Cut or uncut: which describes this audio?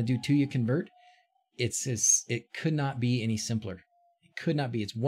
uncut